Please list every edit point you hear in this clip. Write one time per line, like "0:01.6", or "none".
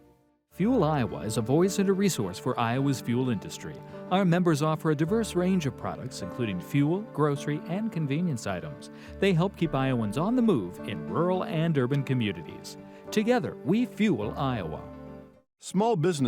none